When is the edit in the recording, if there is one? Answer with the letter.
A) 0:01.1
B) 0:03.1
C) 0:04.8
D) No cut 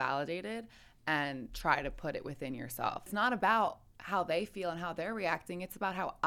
B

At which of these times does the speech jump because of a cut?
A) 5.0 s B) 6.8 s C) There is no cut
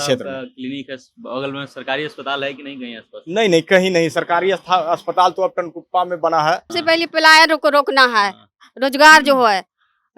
B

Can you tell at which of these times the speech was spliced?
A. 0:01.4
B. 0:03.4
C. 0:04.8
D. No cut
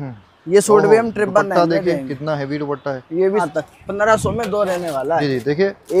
B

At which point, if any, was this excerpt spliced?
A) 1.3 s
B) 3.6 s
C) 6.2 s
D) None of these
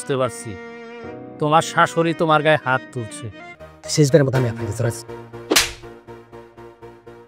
B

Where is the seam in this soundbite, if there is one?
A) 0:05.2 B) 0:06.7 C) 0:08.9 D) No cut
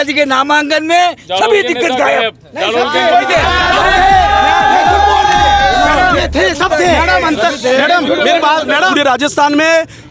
C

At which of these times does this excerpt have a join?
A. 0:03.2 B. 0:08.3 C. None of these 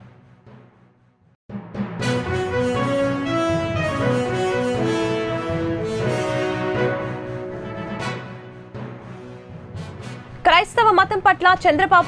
B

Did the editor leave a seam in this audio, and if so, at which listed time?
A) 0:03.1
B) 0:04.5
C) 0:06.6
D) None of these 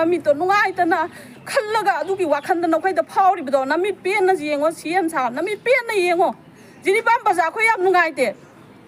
D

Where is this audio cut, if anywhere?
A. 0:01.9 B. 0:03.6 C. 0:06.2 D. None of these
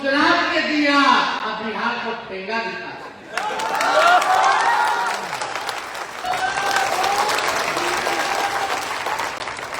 C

